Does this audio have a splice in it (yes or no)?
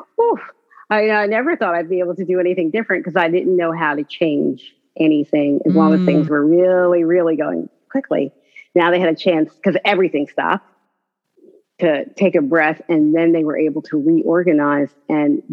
no